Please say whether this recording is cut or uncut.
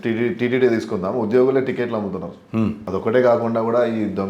cut